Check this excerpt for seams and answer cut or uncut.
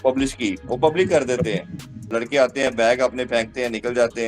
cut